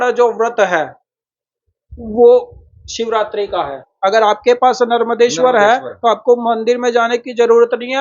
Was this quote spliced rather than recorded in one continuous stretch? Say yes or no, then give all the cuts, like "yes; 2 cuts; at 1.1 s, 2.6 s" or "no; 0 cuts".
yes; 1 cut; at 3.9 s